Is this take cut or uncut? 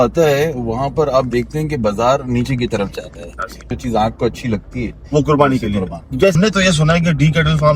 cut